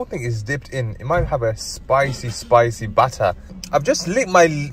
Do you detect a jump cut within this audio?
yes; 1 cut; at 3.6 s

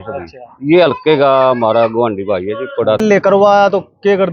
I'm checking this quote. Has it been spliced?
yes; 1 cut; at 3.0 s

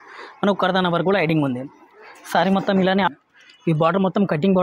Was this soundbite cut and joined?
yes; 1 cut; at 3.1 s

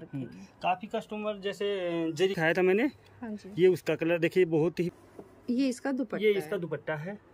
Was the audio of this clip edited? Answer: yes; 2 cuts; at 2.4 s, 4.9 s

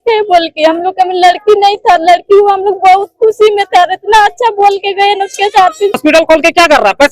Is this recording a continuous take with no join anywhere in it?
no; 1 cut; at 6.0 s

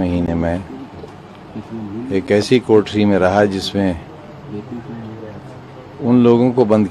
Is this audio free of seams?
yes; 0 cuts

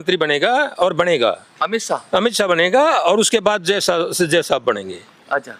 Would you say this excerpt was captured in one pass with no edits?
yes; 0 cuts

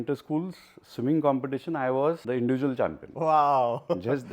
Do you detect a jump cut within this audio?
yes; 1 cut; at 2.2 s

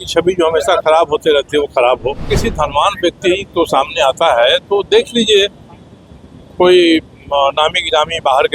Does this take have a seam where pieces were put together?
yes; 1 cut; at 2.3 s

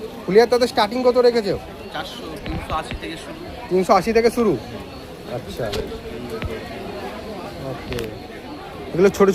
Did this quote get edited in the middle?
no; 0 cuts

